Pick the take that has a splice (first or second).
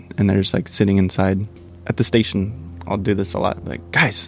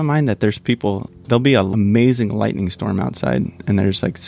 second